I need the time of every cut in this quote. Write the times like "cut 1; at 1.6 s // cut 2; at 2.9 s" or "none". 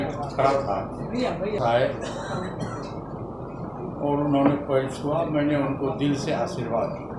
cut 1; at 1.6 s